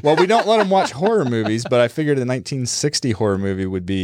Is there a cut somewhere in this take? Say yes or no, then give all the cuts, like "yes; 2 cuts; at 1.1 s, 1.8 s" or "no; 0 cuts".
no; 0 cuts